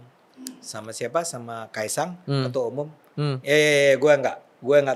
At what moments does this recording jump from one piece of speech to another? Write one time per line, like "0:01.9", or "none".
none